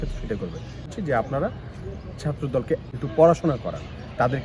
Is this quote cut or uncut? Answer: cut